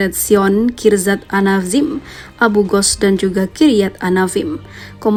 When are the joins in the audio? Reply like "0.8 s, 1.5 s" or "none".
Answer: none